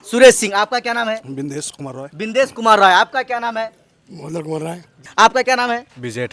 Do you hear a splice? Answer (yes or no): yes